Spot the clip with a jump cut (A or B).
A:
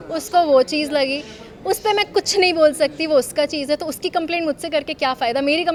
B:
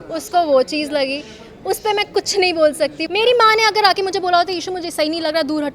B